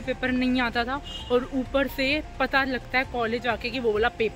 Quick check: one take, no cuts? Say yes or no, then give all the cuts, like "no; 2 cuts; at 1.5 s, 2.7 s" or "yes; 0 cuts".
yes; 0 cuts